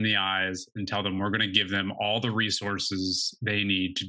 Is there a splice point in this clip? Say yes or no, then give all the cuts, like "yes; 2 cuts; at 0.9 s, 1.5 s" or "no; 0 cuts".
no; 0 cuts